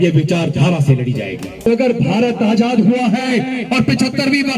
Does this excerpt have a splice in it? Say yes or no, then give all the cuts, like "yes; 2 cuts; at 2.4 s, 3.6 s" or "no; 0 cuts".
yes; 1 cut; at 1.7 s